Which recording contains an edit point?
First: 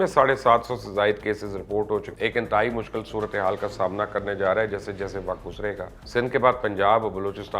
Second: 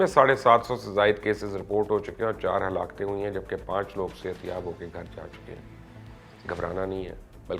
first; 2 cuts; at 2.1 s, 5.9 s

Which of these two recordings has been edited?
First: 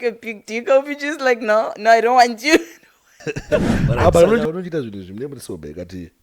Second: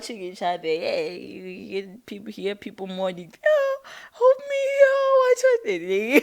first; 1 cut; at 4.4 s

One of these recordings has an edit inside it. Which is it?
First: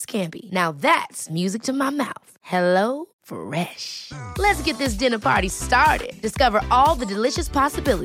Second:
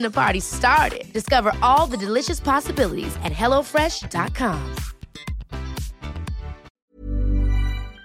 second; 1 cut; at 6.7 s

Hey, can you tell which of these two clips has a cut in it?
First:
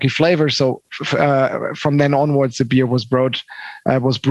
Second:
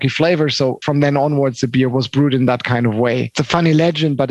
second; 3 cuts; at 0.8 s, 1.9 s, 3.3 s

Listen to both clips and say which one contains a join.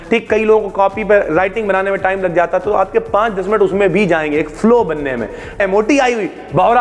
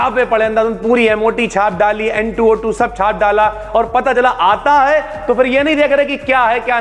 first; 1 cut; at 5.5 s

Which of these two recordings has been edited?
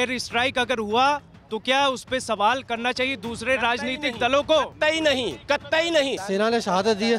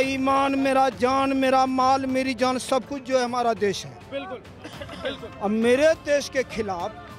first; 1 cut; at 6.2 s

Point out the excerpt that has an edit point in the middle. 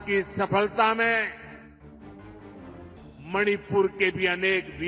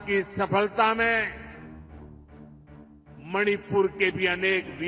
second; 2 cuts; at 1.4 s, 3.0 s

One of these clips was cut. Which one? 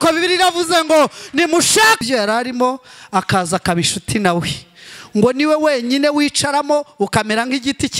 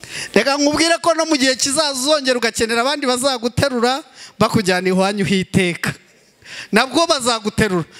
first; 1 cut; at 2.0 s

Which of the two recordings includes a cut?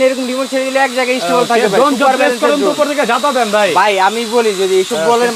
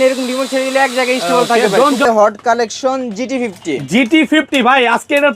second; 1 cut; at 2.0 s

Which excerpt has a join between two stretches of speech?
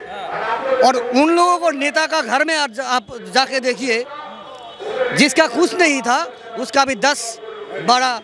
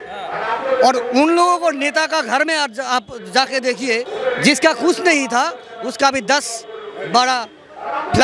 second; 1 cut; at 4.1 s

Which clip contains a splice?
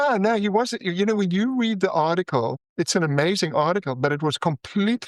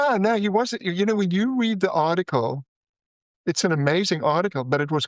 first; 1 cut; at 2.6 s

